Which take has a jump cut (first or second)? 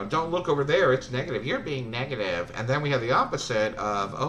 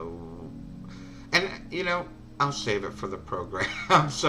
second